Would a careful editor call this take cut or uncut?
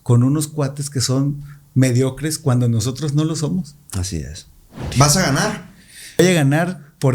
cut